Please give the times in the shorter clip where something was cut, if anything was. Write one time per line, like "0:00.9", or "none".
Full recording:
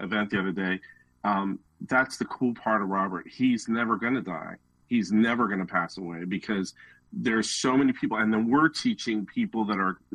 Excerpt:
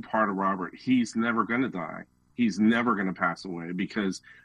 none

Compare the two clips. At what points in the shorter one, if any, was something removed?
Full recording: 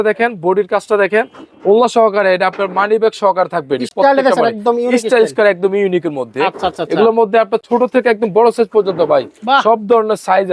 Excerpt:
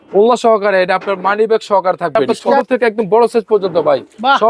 0:02.6

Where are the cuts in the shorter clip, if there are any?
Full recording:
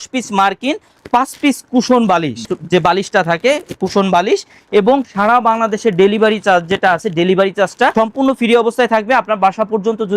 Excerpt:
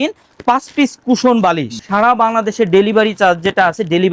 0:01.8

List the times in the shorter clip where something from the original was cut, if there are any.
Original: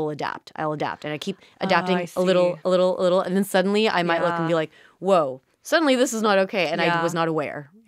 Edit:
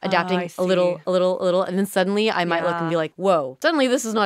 0:03.3

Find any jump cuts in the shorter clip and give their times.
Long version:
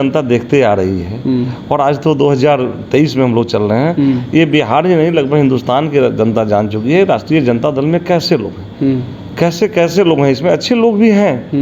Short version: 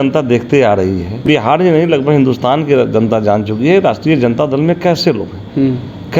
0:01.2

